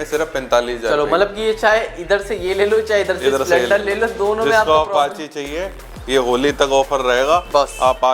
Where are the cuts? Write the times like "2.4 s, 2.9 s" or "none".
5.8 s

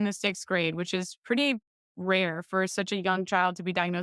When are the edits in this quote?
none

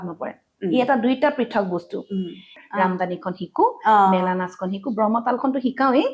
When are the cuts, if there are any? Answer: 2.6 s

